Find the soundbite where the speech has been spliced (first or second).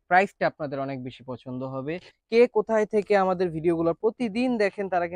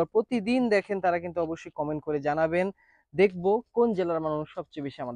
first